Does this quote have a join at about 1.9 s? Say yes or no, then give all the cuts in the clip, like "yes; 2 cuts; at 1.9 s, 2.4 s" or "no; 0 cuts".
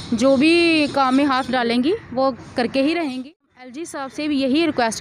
no; 1 cut; at 3.9 s